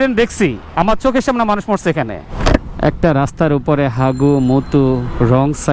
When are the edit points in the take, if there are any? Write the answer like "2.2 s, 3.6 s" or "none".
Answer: none